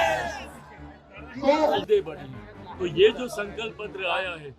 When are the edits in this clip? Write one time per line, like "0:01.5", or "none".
0:01.8

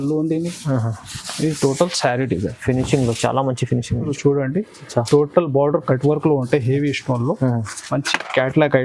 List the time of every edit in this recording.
0:04.1

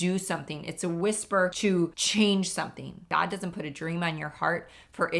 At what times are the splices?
0:01.8
0:03.0

